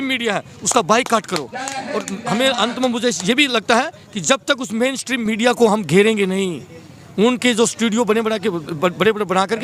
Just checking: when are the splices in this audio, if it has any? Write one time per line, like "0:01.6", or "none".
none